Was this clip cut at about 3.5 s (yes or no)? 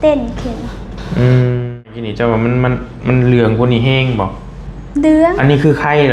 no